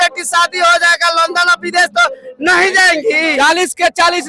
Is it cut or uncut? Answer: cut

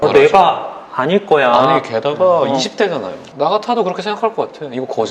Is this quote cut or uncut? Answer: cut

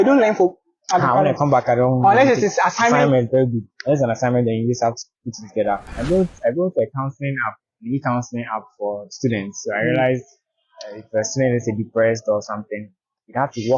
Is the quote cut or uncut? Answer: cut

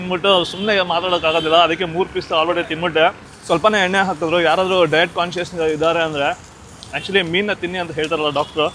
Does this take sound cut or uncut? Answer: uncut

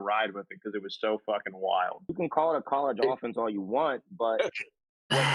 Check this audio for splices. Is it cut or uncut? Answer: cut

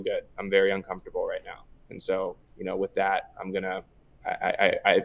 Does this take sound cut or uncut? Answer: uncut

